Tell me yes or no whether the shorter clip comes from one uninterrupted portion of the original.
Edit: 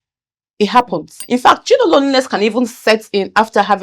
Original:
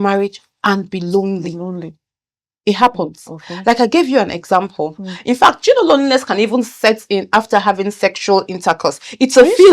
no